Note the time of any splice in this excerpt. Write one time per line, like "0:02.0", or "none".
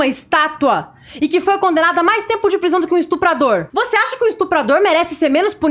0:03.7